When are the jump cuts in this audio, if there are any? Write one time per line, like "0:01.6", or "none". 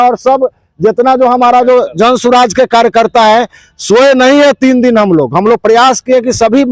none